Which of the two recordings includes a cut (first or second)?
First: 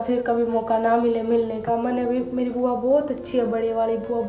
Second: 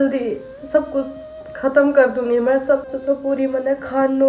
second